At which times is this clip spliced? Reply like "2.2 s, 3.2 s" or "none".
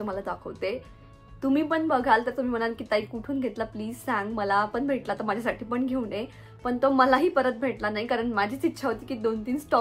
none